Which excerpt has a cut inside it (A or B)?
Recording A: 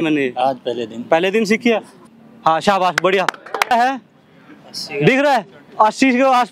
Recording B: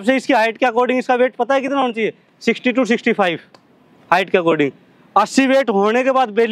A